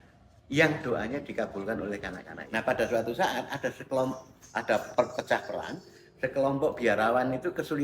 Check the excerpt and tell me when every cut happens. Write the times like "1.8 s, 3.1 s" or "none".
2.3 s